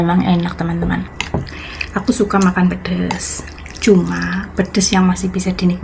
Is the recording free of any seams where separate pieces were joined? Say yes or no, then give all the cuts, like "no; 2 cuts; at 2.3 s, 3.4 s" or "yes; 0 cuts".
no; 1 cut; at 1.2 s